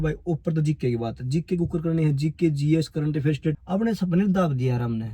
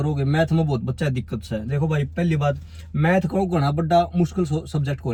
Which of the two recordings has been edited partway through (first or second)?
first